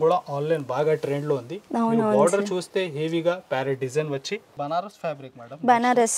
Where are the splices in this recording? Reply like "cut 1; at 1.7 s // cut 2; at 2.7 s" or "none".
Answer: cut 1; at 4.5 s

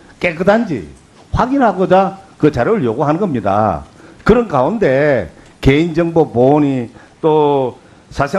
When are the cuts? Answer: cut 1; at 5.9 s

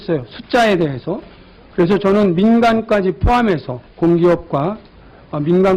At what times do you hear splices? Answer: none

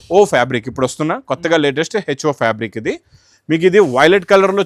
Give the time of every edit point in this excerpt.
none

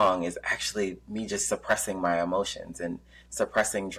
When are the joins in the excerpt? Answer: none

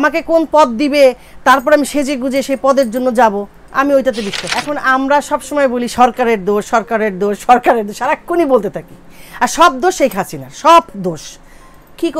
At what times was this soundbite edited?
cut 1; at 4.4 s

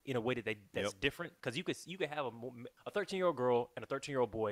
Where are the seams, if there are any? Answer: cut 1; at 2.6 s

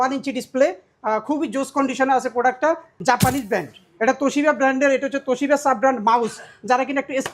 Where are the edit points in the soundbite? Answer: cut 1; at 2.9 s

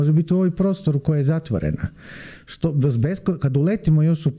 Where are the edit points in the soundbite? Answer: none

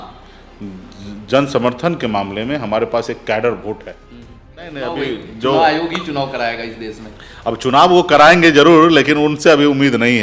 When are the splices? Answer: cut 1; at 4.6 s

